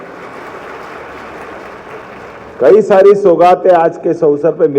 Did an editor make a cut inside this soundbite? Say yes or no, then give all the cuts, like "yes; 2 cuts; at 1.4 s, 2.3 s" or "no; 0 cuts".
no; 0 cuts